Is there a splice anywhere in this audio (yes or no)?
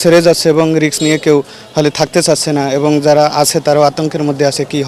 no